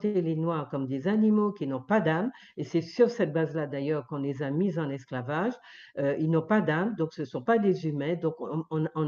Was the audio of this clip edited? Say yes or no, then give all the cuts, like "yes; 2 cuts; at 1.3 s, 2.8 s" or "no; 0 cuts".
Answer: no; 0 cuts